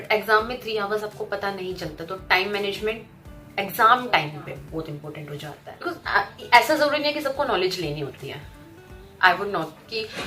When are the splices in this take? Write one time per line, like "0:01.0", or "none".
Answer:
0:05.7